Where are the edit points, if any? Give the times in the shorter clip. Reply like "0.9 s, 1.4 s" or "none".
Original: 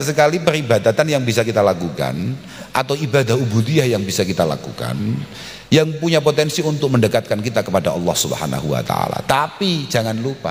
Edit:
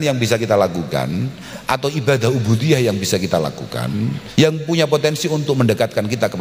4.2 s